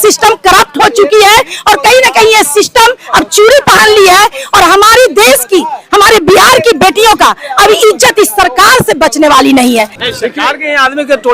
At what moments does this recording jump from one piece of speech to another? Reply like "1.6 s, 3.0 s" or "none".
10.0 s